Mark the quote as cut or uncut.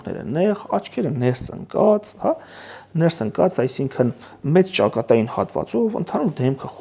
uncut